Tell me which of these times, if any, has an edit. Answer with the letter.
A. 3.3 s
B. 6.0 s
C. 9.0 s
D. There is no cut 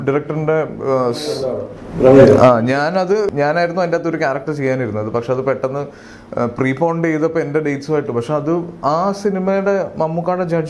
A